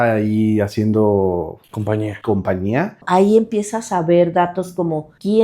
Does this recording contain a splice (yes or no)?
yes